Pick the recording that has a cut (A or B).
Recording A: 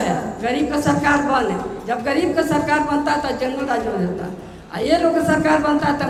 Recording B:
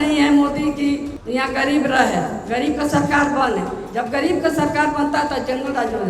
B